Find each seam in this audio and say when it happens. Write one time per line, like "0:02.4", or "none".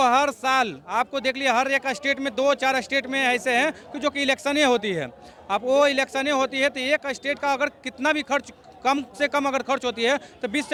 none